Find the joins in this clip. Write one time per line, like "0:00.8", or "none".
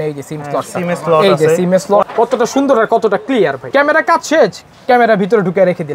0:02.0
0:03.6